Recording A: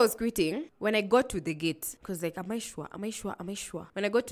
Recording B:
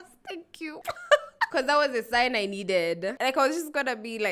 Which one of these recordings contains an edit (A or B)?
B